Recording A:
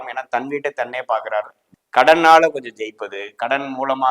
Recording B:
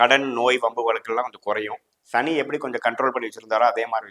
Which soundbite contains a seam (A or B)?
A